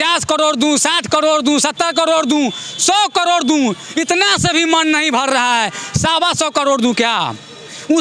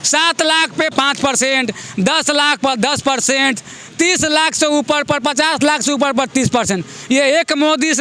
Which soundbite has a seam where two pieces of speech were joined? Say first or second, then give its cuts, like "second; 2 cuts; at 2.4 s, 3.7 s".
second; 1 cut; at 0.9 s